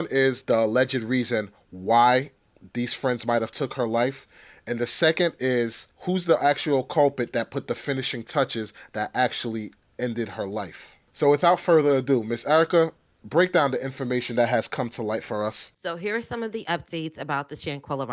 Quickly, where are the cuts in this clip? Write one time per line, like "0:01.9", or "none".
none